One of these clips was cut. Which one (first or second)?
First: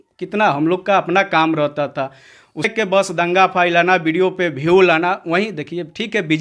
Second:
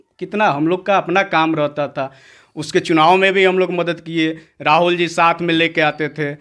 first